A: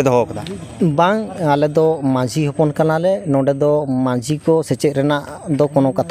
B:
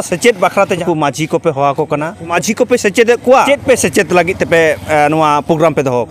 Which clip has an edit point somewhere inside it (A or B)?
B